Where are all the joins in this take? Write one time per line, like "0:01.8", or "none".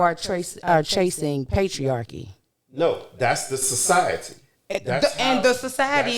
none